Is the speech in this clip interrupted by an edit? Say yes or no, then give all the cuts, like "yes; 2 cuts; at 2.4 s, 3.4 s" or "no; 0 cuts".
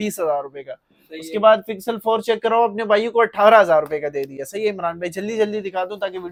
no; 0 cuts